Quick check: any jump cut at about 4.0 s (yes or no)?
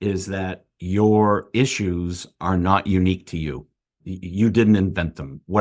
yes